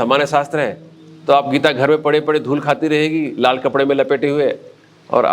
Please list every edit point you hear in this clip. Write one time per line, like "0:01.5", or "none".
none